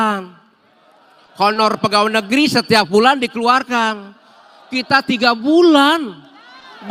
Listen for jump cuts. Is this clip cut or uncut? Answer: uncut